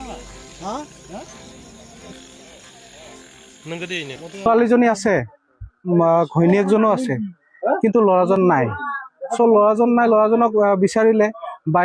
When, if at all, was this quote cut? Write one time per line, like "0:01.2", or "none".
0:04.4